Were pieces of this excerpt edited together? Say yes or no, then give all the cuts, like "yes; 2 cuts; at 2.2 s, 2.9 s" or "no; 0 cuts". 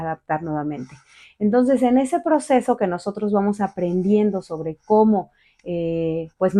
no; 0 cuts